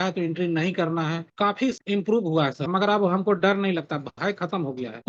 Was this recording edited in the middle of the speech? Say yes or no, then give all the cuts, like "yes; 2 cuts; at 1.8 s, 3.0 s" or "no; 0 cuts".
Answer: yes; 1 cut; at 2.6 s